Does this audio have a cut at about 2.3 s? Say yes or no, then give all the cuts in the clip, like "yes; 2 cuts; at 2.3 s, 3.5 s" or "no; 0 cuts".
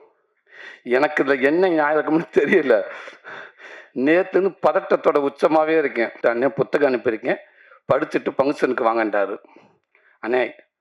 no; 1 cut; at 6.1 s